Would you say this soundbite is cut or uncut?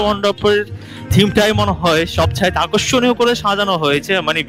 uncut